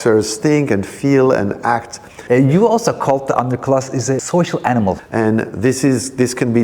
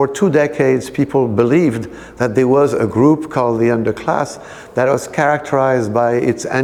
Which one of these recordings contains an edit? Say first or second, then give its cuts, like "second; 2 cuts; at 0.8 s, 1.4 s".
first; 3 cuts; at 2.2 s, 4.2 s, 5.0 s